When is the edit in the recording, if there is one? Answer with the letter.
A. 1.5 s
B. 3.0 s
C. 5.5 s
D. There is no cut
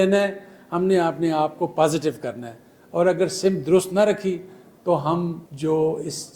C